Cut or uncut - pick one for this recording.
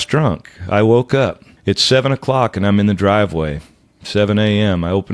cut